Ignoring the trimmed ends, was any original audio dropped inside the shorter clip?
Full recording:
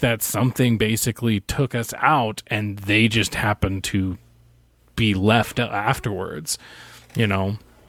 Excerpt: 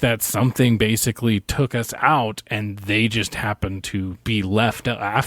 yes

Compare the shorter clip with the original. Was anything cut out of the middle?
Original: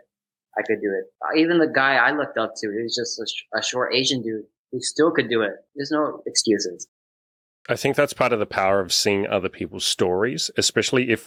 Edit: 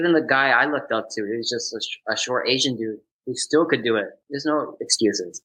no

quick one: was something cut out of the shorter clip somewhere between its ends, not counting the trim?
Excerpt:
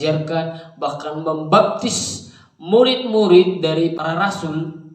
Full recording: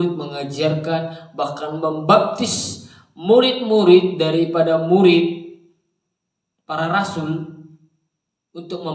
yes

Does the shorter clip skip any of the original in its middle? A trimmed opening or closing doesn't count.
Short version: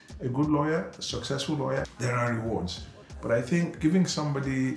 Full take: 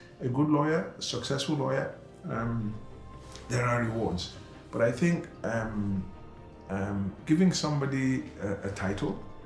yes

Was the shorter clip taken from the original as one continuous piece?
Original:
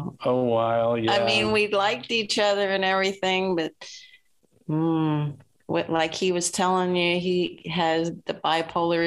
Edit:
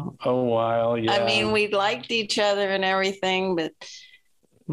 yes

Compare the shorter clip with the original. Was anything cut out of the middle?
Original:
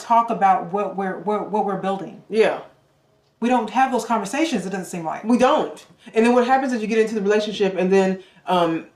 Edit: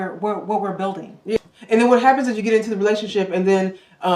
yes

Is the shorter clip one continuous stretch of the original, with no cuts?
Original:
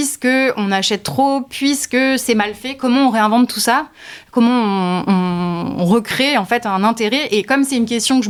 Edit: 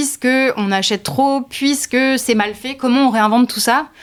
yes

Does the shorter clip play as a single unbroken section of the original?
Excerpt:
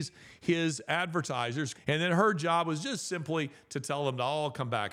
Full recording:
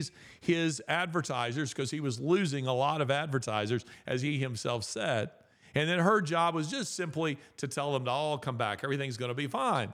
no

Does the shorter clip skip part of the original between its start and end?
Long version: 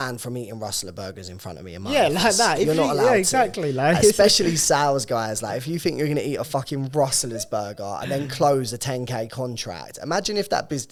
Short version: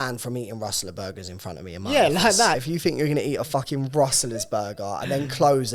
yes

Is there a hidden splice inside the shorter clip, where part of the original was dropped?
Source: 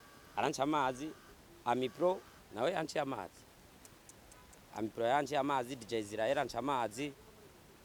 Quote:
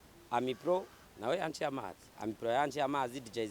yes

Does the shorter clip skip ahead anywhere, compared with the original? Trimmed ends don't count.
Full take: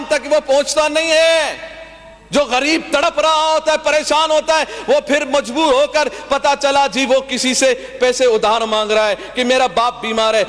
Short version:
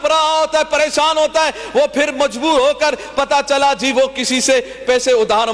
no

